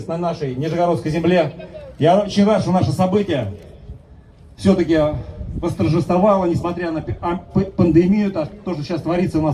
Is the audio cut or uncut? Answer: uncut